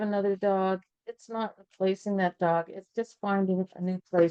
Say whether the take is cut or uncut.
uncut